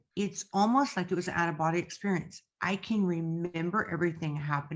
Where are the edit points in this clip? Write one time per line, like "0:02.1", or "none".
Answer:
none